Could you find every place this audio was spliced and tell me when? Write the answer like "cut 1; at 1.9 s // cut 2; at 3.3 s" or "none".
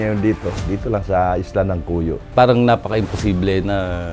cut 1; at 2.2 s